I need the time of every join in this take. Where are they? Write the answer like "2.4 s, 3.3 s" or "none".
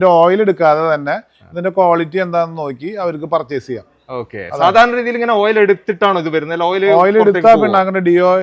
none